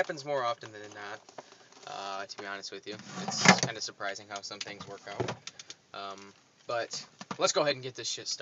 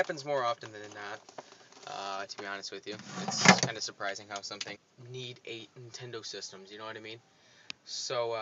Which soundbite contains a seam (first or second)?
first